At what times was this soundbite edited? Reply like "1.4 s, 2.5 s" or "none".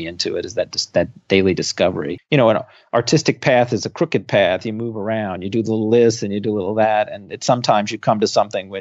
2.2 s